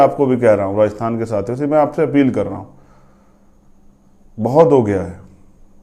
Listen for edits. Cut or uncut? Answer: uncut